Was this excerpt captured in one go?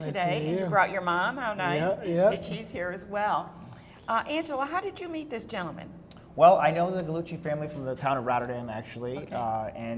yes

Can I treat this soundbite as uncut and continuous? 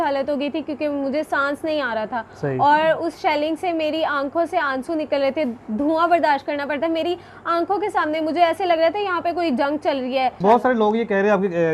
no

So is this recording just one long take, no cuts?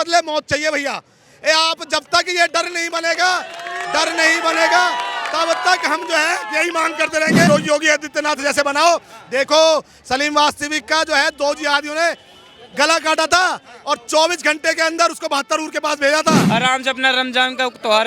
no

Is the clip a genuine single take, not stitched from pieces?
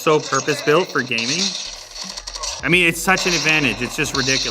no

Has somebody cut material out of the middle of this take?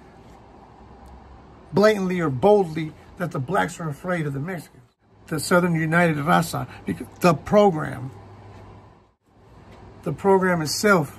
yes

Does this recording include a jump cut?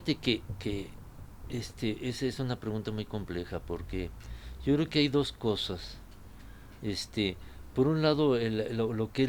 no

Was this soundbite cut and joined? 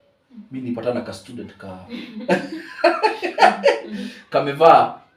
no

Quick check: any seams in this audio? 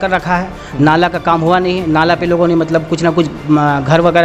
no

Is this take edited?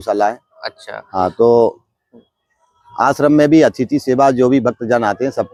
no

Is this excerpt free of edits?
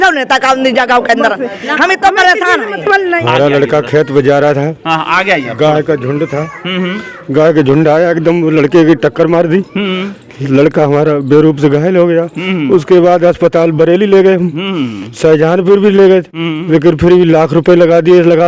no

